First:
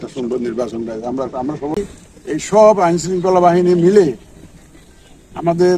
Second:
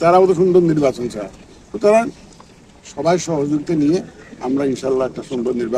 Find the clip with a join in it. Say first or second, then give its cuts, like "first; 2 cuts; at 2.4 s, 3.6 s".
first; 1 cut; at 1.8 s